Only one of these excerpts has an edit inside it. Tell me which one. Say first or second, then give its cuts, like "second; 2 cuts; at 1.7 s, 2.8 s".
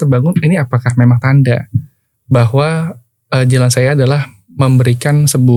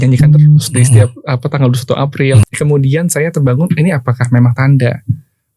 second; 1 cut; at 2.4 s